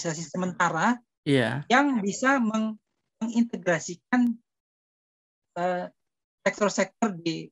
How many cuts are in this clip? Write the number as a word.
zero